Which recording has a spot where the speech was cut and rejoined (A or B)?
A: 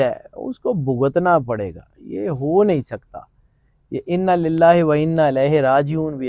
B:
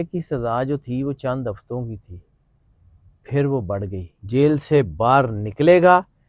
B